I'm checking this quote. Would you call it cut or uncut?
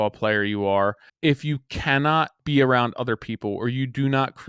cut